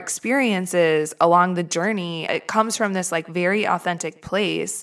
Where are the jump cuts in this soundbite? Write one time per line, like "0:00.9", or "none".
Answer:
0:02.3